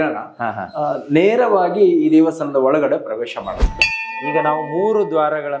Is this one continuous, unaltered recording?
no; 1 cut; at 3.6 s

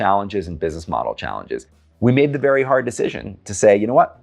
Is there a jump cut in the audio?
yes; 1 cut; at 1.8 s

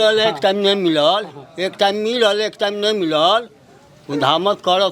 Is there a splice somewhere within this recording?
no; 0 cuts

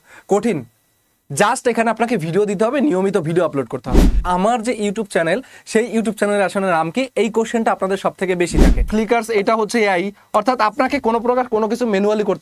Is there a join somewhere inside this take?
yes; 2 cuts; at 4.2 s, 8.9 s

